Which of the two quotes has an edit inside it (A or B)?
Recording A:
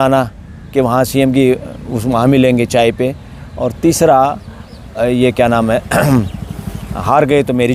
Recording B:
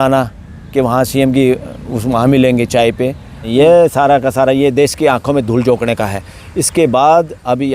B